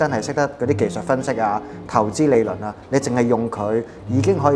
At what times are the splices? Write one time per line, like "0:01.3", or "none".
none